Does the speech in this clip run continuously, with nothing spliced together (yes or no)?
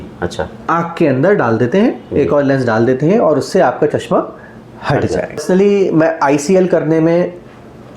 no